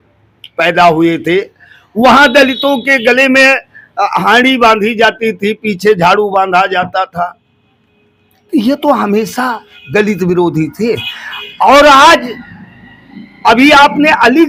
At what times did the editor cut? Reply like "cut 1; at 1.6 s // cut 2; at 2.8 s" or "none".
none